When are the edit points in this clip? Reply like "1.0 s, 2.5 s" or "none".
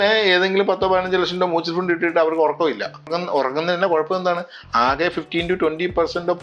3.1 s